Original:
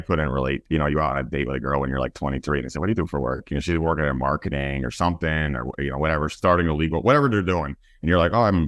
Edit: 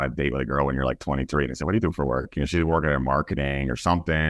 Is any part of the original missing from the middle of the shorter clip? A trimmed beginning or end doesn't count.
no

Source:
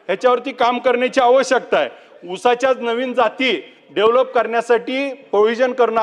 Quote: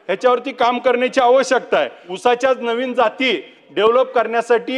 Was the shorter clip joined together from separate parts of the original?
yes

